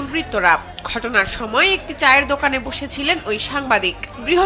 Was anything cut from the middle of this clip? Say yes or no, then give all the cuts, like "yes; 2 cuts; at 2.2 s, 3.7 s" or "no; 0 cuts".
no; 0 cuts